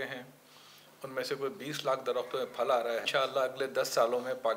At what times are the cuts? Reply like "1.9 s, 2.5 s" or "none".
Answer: 3.1 s